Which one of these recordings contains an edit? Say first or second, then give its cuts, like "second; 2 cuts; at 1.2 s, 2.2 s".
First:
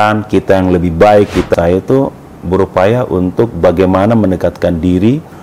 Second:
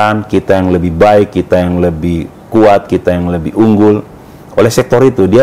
first; 1 cut; at 1.6 s